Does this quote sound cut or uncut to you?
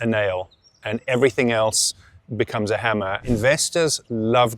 cut